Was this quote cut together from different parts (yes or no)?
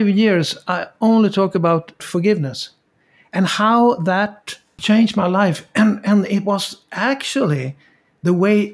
yes